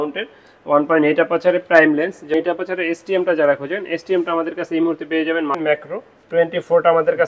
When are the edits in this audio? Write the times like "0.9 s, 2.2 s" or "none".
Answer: 2.3 s, 5.6 s